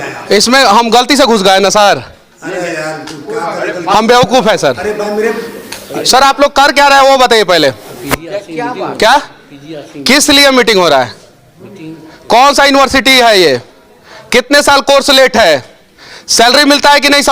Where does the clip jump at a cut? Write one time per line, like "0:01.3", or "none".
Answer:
none